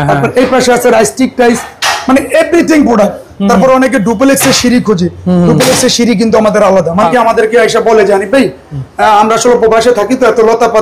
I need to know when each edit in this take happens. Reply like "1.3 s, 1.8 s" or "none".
7.1 s